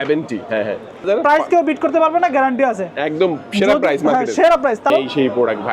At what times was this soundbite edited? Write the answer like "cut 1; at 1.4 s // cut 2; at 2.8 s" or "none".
cut 1; at 1.0 s // cut 2; at 4.9 s